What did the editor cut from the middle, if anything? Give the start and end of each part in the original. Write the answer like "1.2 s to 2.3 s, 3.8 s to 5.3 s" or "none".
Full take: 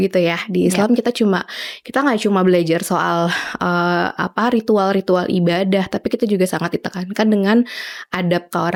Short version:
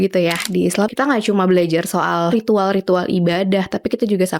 0.9 s to 1.8 s, 3.3 s to 4.5 s